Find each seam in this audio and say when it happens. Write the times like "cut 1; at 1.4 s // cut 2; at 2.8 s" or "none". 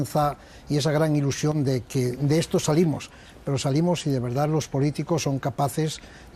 cut 1; at 1.6 s